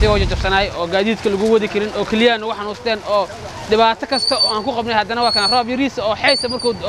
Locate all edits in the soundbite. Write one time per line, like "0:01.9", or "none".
none

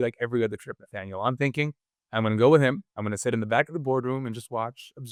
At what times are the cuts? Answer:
none

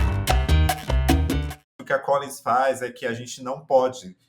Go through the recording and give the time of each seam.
0:01.6

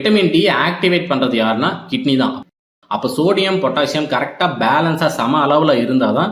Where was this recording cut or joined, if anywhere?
0:02.5

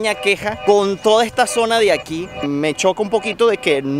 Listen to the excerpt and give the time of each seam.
0:02.4

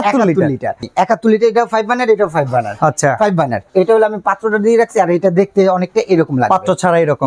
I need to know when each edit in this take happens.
0:00.9
0:03.7

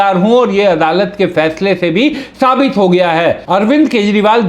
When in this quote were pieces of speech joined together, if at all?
0:03.4

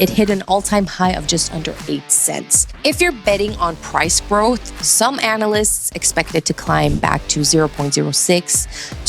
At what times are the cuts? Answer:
0:02.6

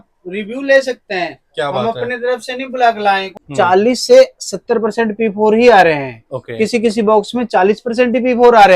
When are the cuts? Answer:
0:03.4

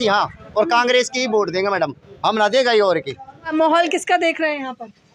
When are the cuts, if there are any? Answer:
0:03.5

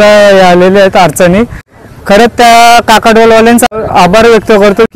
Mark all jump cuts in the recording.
0:01.6
0:03.7

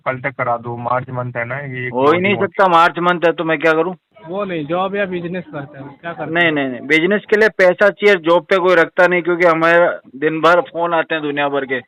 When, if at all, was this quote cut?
0:04.1

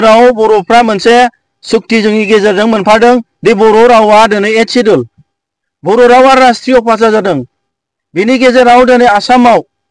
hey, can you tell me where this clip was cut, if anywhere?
none

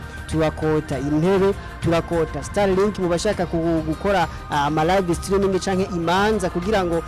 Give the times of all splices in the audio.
none

